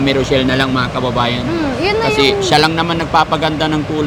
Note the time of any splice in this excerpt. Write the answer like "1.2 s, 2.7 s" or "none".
none